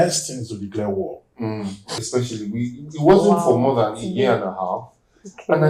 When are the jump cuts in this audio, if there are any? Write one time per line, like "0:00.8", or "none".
0:02.0